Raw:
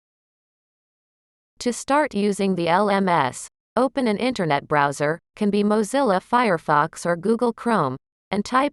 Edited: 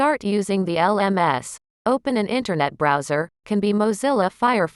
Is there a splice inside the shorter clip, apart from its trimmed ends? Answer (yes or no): no